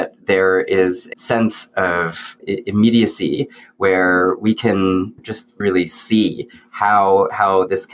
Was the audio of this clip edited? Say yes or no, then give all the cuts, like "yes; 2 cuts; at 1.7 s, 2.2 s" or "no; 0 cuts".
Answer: yes; 1 cut; at 5.6 s